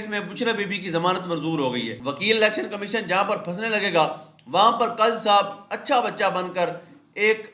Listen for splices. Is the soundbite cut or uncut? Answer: cut